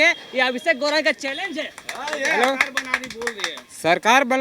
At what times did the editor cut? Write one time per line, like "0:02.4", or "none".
none